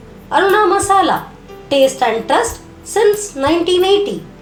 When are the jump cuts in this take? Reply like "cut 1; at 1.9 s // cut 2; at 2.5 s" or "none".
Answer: none